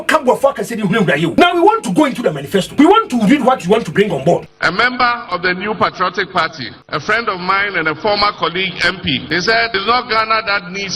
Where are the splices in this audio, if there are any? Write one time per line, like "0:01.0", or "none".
0:01.3
0:02.7
0:04.6
0:06.7
0:09.7